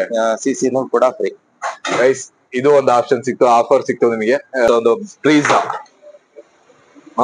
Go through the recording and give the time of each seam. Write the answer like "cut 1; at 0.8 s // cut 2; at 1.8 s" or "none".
cut 1; at 4.7 s